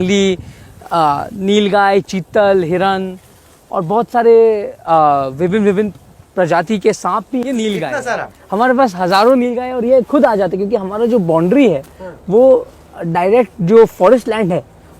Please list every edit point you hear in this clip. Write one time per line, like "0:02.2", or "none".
0:07.4